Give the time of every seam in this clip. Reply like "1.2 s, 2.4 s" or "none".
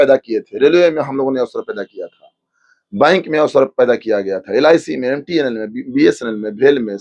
none